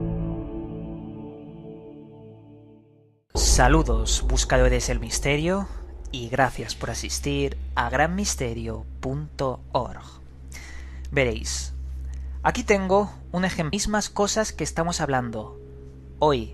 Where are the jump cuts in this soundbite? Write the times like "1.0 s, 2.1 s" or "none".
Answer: none